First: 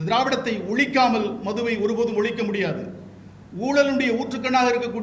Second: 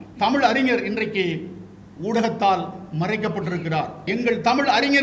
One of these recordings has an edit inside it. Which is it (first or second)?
second